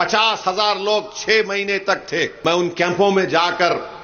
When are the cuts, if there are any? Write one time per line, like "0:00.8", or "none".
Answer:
0:02.4